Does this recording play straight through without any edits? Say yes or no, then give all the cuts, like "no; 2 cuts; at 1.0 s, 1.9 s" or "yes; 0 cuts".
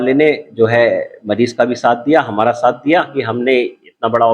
yes; 0 cuts